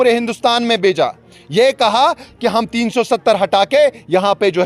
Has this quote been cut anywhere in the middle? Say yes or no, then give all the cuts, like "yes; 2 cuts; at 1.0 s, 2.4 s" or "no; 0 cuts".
no; 0 cuts